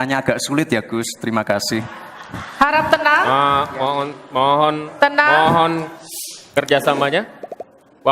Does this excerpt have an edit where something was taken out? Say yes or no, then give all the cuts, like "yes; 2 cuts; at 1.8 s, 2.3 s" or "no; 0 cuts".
no; 0 cuts